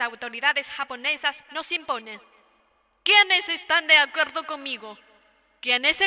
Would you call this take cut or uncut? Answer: uncut